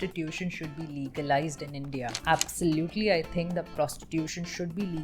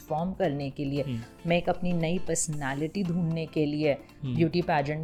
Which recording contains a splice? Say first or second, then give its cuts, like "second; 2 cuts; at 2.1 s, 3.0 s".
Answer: first; 2 cuts; at 2.1 s, 3.7 s